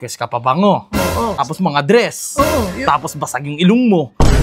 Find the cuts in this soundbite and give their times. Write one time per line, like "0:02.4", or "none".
0:01.5